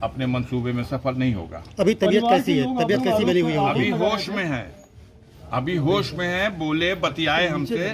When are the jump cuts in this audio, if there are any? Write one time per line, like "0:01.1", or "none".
none